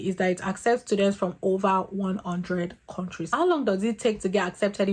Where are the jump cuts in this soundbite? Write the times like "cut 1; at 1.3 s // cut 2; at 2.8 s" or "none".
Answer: cut 1; at 3.3 s